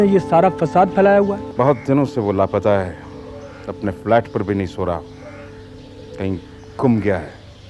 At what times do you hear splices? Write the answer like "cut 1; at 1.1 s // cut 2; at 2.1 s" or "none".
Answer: cut 1; at 1.5 s